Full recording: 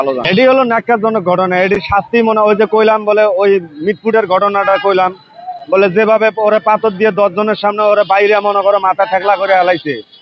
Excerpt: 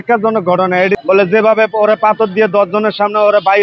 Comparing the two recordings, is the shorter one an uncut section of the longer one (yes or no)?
no